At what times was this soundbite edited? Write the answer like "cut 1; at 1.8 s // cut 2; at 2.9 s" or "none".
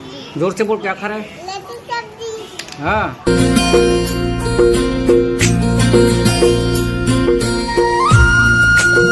cut 1; at 3.2 s